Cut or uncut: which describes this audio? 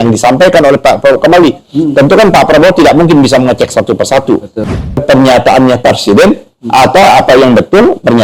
cut